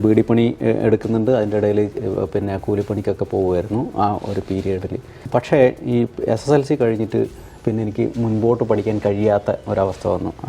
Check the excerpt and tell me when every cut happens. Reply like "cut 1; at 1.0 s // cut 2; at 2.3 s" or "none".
cut 1; at 5.1 s

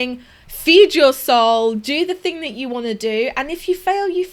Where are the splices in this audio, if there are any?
none

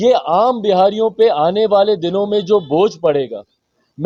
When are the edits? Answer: none

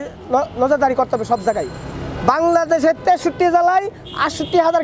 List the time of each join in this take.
none

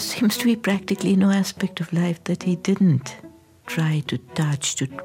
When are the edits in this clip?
none

